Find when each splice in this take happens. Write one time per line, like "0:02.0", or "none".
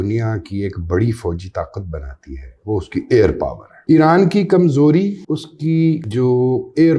0:03.7
0:05.2
0:06.1